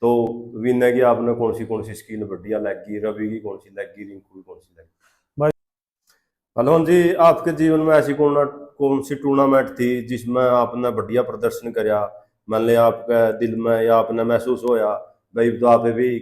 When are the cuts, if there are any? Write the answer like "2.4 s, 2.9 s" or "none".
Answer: 5.5 s